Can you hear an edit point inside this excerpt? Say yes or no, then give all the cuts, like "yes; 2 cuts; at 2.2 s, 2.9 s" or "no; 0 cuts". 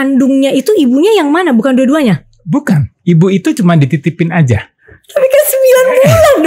no; 0 cuts